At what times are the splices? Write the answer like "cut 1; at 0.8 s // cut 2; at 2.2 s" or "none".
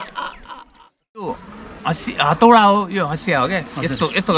cut 1; at 1.3 s